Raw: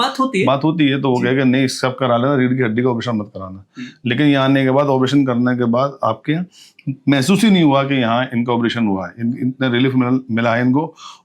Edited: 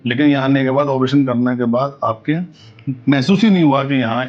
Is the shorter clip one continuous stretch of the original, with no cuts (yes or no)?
yes